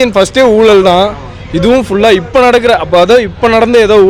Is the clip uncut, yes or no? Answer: yes